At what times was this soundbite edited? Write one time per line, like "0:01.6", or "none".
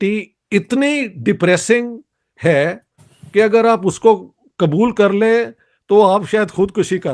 none